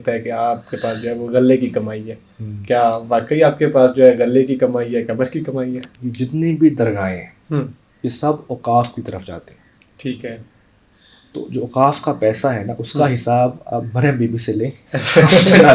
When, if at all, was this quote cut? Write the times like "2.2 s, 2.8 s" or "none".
6.0 s